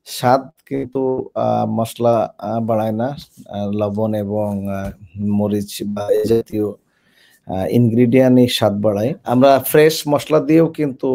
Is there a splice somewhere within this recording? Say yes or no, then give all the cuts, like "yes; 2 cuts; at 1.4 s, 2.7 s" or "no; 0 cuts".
yes; 1 cut; at 9.2 s